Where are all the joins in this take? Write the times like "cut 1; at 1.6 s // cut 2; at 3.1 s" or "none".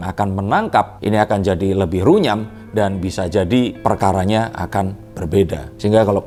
none